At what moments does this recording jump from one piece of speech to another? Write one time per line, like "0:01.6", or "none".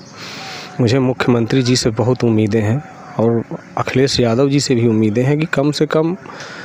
none